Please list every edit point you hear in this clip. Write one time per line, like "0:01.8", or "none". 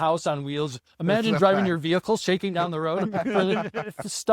none